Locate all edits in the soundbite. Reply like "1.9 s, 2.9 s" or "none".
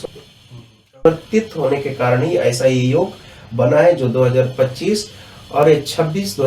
1.0 s